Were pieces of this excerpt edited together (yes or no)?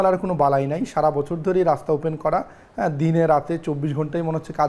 no